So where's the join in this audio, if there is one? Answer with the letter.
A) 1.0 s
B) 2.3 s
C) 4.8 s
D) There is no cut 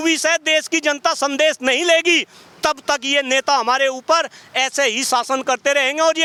D